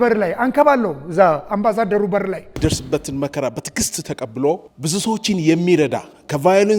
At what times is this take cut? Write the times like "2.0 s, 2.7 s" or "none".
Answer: 2.5 s, 4.7 s